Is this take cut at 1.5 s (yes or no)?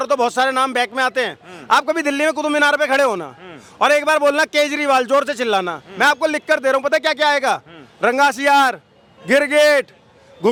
no